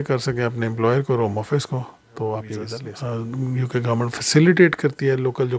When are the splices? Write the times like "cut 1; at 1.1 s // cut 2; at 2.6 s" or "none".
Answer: cut 1; at 2.8 s